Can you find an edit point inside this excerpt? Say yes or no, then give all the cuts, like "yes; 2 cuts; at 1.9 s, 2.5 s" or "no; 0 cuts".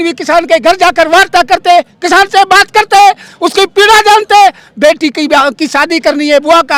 no; 0 cuts